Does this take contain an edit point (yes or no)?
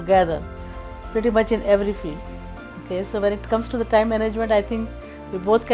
no